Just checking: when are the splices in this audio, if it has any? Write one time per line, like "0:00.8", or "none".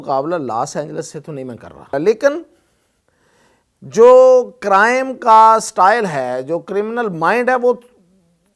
0:01.9